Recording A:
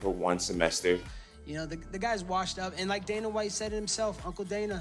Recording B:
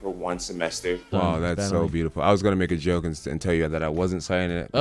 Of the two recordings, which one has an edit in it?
B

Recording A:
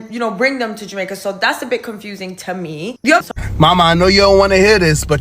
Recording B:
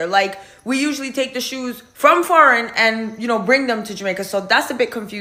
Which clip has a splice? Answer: A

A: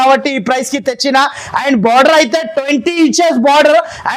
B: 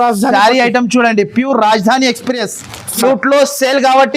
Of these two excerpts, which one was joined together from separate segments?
B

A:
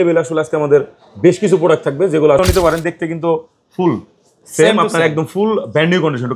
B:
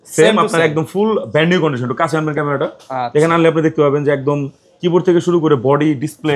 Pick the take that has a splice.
A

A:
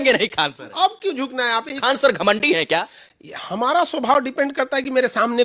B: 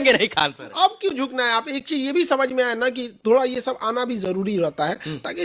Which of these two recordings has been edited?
A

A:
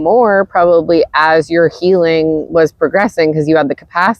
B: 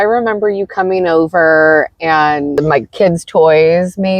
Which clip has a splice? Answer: B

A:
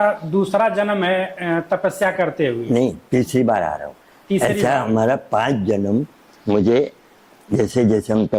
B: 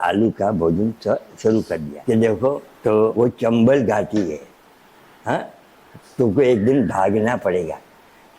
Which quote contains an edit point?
B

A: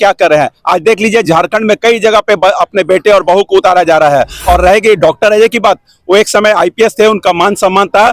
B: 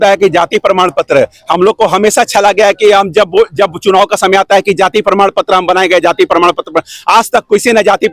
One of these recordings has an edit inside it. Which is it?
A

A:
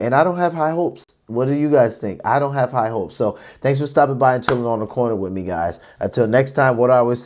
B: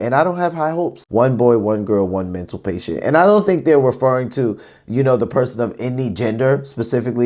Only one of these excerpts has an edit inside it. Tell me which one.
B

